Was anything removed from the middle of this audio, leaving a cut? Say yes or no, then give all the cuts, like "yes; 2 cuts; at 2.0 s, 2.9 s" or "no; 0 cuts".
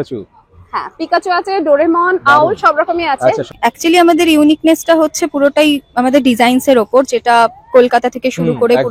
yes; 1 cut; at 3.5 s